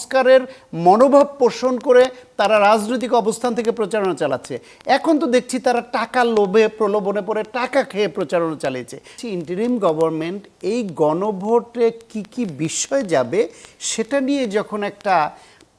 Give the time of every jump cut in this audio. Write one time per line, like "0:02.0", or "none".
0:09.2